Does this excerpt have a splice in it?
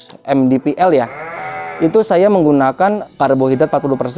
yes; 1 cut; at 3.0 s

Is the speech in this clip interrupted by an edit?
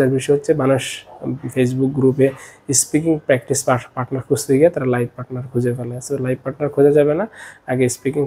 no; 0 cuts

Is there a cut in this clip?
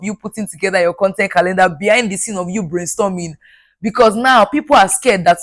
no; 0 cuts

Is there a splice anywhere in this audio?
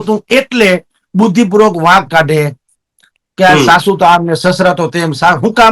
no; 0 cuts

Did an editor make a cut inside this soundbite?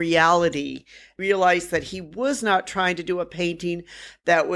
yes; 1 cut; at 1.1 s

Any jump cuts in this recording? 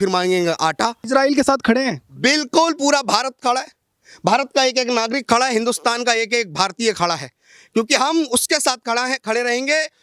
yes; 1 cut; at 1.0 s

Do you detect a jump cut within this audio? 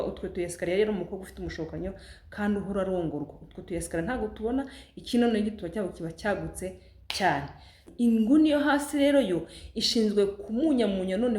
yes; 1 cut; at 7.9 s

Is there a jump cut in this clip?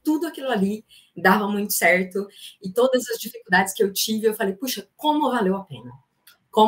yes; 1 cut; at 2.4 s

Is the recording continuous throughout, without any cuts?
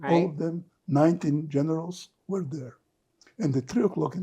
yes; 0 cuts

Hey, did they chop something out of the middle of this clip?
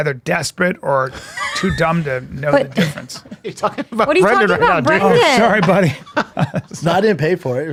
no; 0 cuts

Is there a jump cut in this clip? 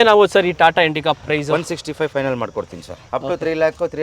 yes; 1 cut; at 3.0 s

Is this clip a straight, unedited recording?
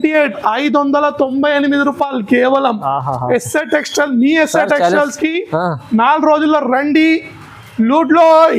yes; 0 cuts

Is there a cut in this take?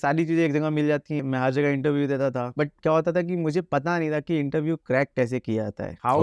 yes; 1 cut; at 1.2 s

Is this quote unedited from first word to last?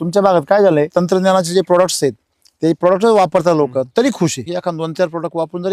no; 2 cuts; at 0.9 s, 4.5 s

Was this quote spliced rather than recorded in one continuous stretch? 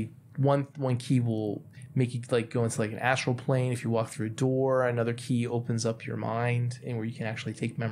no; 0 cuts

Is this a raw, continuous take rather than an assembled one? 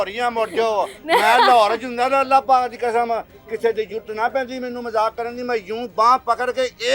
yes; 0 cuts

